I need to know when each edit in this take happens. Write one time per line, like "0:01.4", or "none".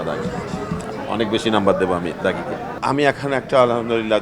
0:02.7

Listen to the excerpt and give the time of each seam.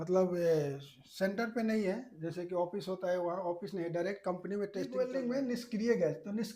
0:04.9

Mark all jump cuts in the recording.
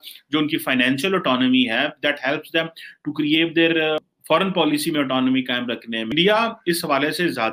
0:04.0
0:06.1

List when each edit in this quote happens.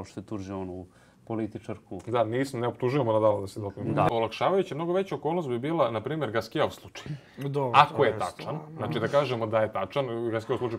0:04.1

